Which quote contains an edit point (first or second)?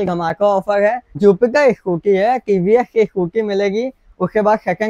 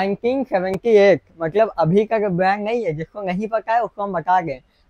first